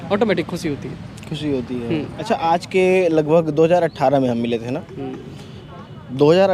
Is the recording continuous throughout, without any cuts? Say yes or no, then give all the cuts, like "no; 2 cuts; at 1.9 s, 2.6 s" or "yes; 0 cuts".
no; 1 cut; at 2.1 s